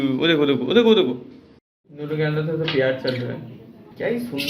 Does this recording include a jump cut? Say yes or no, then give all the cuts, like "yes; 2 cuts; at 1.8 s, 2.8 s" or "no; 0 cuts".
yes; 1 cut; at 1.7 s